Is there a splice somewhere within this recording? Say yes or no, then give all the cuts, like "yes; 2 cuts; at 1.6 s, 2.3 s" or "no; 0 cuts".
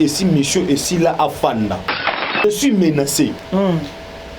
yes; 1 cut; at 2.4 s